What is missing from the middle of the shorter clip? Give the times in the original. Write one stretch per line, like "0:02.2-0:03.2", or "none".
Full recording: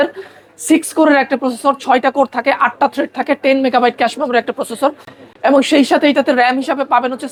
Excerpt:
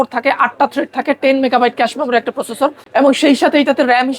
0:05.0-0:05.3